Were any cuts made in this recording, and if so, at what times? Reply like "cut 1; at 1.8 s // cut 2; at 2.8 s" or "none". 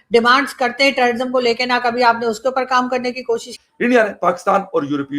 cut 1; at 3.5 s